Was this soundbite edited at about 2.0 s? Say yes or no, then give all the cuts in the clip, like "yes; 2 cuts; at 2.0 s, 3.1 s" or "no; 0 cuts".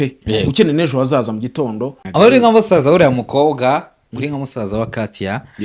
yes; 1 cut; at 2.0 s